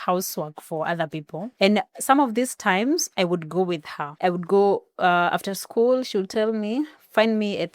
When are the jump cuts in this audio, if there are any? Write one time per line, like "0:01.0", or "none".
0:01.4
0:04.0